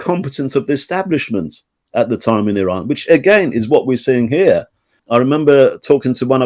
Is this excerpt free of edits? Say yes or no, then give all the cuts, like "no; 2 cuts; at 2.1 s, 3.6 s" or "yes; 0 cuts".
no; 1 cut; at 5.0 s